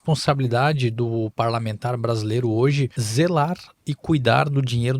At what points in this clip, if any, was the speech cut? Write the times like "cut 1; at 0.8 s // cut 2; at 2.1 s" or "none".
cut 1; at 3.0 s